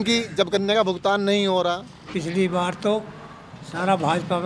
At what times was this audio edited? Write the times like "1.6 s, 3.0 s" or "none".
2.1 s